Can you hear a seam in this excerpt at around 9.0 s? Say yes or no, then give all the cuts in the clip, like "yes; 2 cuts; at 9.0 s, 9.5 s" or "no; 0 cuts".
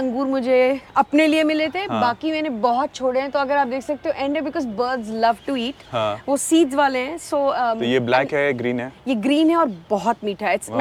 no; 0 cuts